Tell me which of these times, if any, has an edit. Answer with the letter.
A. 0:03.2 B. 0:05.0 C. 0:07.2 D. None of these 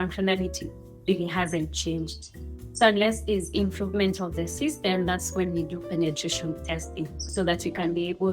C